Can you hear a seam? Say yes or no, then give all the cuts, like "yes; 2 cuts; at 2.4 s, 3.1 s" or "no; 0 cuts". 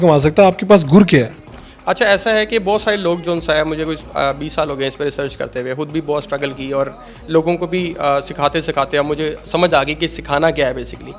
no; 0 cuts